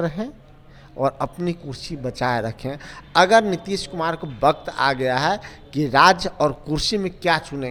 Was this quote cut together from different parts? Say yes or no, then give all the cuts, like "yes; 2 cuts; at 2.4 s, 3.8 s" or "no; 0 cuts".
no; 0 cuts